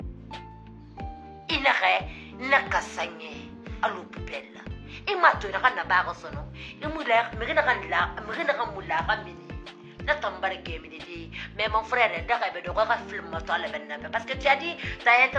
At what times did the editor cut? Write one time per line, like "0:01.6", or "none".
0:01.5